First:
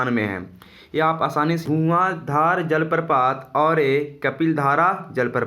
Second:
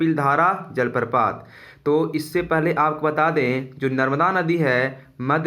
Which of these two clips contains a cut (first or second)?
first